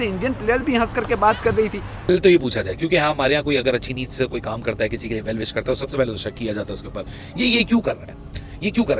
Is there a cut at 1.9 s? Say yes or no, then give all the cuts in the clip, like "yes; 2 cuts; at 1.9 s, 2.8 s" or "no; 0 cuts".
yes; 1 cut; at 1.9 s